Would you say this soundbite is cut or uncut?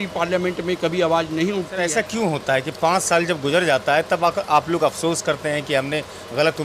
cut